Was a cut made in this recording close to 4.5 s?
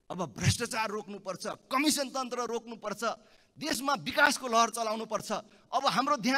no; 0 cuts

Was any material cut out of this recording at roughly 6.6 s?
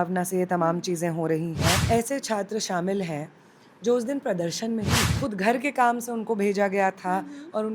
no; 2 cuts; at 1.8 s, 5.0 s

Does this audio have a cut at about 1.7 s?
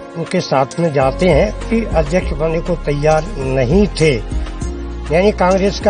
yes; 1 cut; at 1.7 s

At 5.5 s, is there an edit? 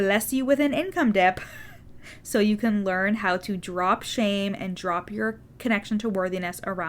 yes; 1 cut; at 5.5 s

